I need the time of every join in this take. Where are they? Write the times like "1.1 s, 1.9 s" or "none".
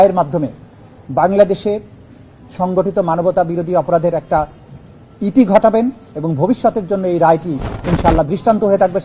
none